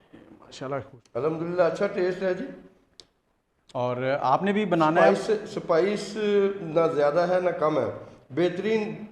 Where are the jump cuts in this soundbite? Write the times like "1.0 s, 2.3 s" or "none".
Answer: 1.0 s